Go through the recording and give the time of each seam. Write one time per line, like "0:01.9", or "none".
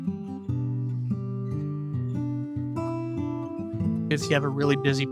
0:04.1

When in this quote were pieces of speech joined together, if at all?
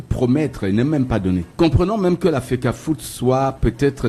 0:01.5

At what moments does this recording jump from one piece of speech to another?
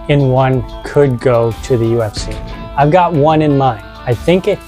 none

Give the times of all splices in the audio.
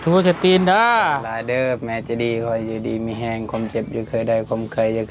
0:01.3

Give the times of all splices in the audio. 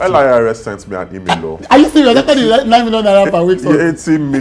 none

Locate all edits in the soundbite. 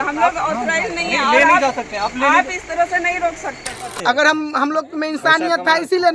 0:03.9

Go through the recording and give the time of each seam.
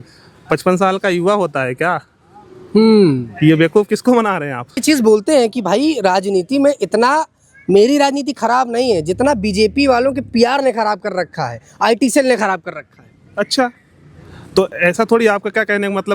0:04.8

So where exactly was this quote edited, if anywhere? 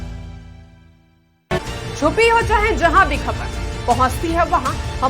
0:01.6

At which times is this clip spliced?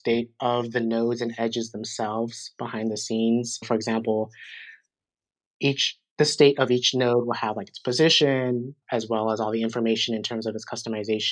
0:03.7
0:08.8

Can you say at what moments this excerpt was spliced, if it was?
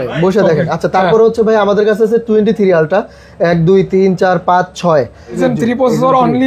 0:05.4

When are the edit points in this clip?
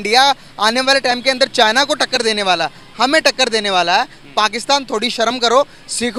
none

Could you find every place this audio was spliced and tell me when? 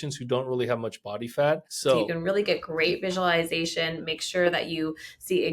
0:01.9

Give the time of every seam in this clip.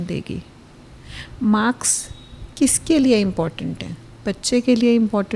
none

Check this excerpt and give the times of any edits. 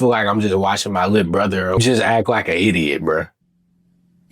0:03.3

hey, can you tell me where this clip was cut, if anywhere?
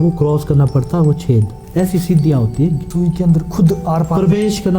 0:01.6
0:02.8

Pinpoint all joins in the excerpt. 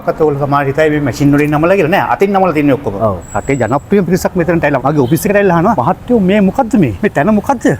0:03.3
0:04.8
0:05.8
0:06.9

